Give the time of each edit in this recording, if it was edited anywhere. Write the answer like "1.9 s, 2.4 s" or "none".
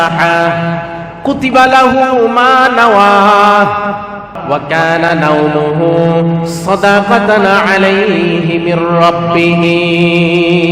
4.4 s